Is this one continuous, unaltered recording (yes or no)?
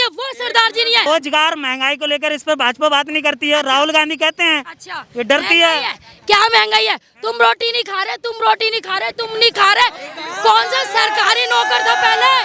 no